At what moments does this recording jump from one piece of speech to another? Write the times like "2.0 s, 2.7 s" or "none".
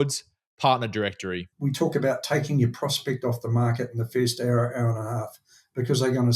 1.5 s